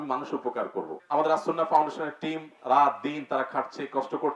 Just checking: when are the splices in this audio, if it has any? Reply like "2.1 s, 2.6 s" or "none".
1.0 s